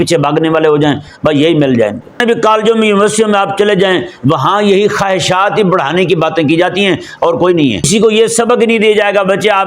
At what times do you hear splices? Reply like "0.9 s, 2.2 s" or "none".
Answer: 2.2 s, 7.9 s